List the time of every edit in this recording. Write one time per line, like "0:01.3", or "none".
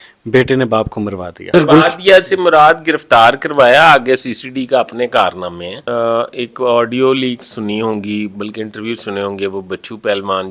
0:01.5
0:05.8